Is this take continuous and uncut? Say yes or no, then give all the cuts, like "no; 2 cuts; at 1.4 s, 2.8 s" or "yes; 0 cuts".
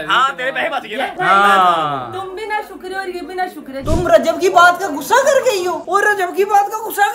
no; 2 cuts; at 1.2 s, 3.8 s